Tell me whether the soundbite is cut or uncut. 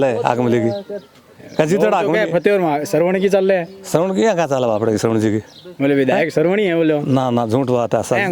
uncut